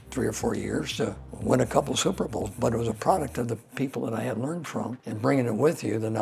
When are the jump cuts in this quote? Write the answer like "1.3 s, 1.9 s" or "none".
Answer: 1.3 s, 5.0 s